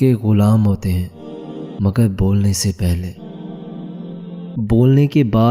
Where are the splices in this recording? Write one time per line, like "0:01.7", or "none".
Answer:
0:03.2
0:04.5